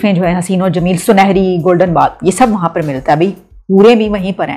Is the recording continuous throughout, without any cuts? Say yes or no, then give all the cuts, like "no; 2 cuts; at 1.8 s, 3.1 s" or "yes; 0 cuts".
yes; 0 cuts